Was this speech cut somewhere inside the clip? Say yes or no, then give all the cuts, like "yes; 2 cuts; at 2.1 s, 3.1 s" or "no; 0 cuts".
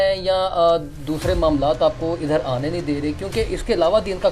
no; 0 cuts